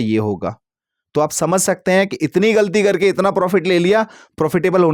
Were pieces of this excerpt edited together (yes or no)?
no